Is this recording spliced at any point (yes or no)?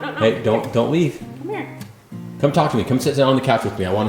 no